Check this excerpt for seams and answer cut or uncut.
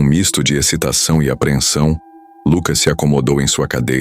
uncut